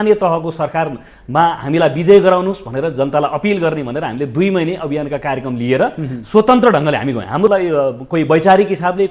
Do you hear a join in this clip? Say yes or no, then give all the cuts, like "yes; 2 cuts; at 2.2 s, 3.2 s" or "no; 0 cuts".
yes; 1 cut; at 7.5 s